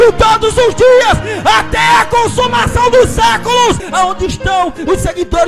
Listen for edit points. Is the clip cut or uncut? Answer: cut